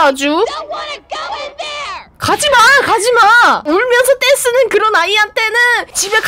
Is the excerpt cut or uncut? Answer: uncut